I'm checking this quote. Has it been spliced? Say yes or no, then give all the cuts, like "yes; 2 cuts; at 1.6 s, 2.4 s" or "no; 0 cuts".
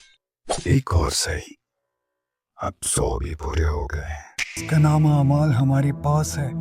yes; 1 cut; at 4.5 s